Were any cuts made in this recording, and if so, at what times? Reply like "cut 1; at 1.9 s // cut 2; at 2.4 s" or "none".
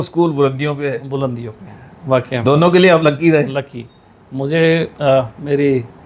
none